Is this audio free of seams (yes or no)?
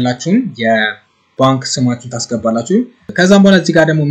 no